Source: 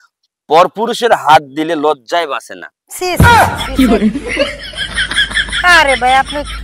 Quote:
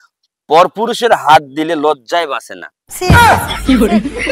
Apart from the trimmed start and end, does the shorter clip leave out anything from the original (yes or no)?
yes